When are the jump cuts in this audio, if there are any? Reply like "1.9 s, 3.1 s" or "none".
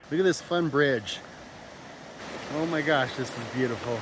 2.2 s

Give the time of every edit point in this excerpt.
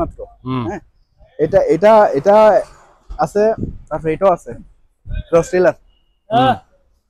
none

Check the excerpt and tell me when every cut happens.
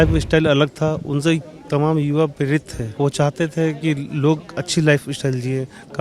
2.8 s

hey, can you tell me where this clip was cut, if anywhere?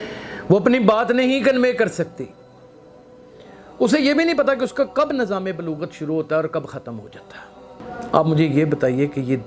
7.7 s

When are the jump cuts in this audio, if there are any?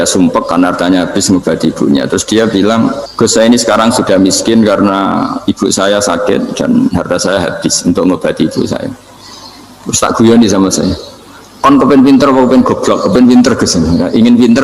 3.0 s

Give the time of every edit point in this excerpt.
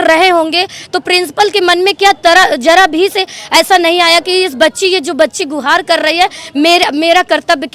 none

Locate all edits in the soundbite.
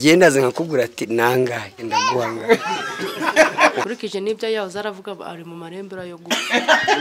3.8 s

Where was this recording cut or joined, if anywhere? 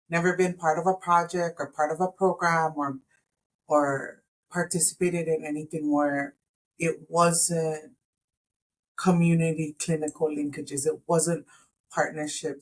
none

